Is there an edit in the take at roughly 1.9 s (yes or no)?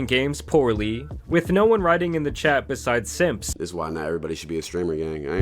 no